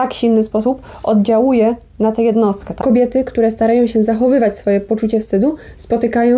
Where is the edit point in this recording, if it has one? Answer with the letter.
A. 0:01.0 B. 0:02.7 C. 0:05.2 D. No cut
B